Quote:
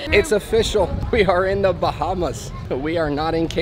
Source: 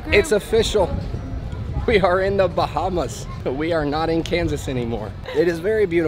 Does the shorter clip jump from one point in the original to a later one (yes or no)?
yes